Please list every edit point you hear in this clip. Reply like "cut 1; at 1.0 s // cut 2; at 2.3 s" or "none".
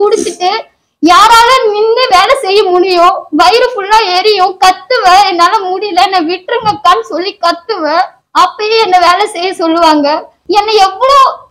cut 1; at 8.2 s // cut 2; at 10.3 s